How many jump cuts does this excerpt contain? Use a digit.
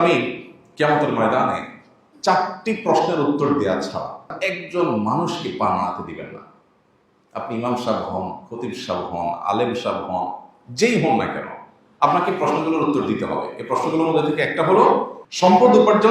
2